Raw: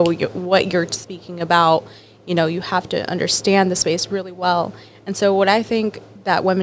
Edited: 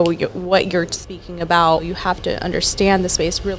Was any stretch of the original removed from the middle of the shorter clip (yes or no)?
yes